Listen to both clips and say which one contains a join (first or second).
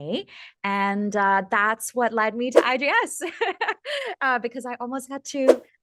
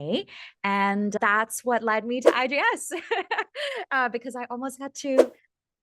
second